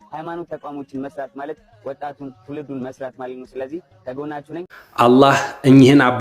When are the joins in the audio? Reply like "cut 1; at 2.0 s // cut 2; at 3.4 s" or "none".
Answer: cut 1; at 4.7 s